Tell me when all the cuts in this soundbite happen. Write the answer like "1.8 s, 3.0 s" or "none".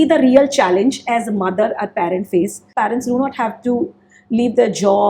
2.7 s